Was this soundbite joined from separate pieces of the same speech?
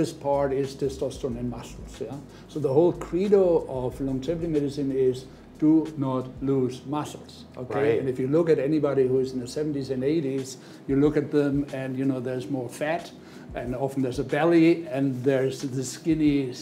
no; 0 cuts

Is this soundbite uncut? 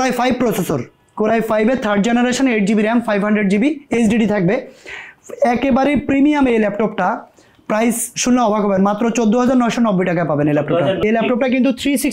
no; 1 cut; at 11.0 s

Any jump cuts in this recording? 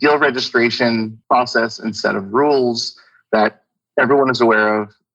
yes; 1 cut; at 1.1 s

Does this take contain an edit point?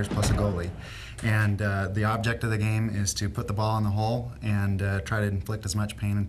no; 0 cuts

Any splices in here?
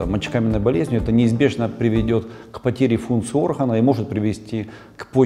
no; 0 cuts

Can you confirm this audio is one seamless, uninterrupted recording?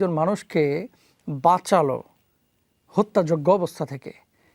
yes; 0 cuts

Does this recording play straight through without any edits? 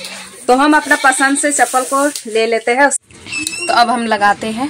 no; 1 cut; at 3.0 s

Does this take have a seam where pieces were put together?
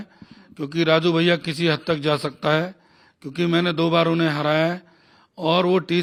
no; 0 cuts

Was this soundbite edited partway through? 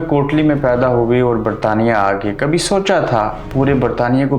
no; 0 cuts

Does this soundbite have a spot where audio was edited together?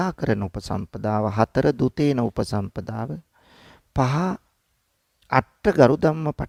no; 0 cuts

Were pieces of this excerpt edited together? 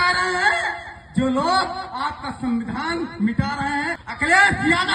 yes; 1 cut; at 4.0 s

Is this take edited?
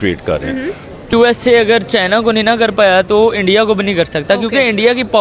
yes; 1 cut; at 1.1 s

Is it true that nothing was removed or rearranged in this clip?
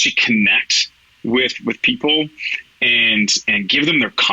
yes; 0 cuts

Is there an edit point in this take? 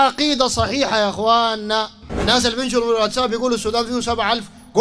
yes; 1 cut; at 2.1 s

